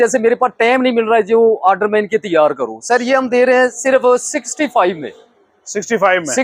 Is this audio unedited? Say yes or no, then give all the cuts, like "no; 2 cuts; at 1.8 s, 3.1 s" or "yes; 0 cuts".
yes; 0 cuts